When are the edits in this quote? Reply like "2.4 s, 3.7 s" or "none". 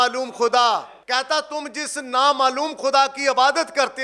0.9 s